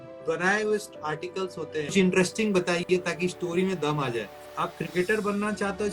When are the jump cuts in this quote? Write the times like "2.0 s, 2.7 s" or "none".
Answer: 1.9 s, 4.4 s